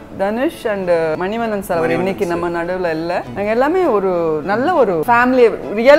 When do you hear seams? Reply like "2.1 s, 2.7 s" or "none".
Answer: 1.2 s, 3.3 s, 5.0 s